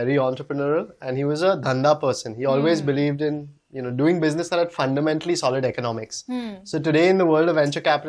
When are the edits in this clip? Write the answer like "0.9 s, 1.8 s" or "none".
none